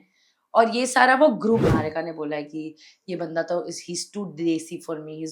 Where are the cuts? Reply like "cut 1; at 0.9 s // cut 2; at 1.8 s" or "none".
cut 1; at 1.7 s